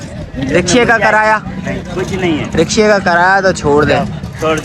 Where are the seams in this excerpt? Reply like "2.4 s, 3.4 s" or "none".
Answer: none